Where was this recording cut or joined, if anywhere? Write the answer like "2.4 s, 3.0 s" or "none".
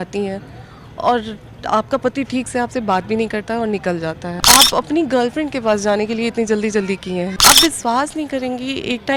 4.4 s, 7.3 s